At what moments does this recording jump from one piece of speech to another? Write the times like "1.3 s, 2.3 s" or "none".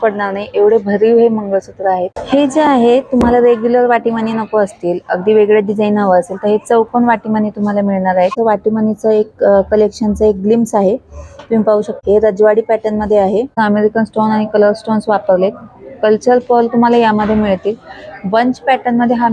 2.1 s, 8.4 s, 12.0 s, 13.5 s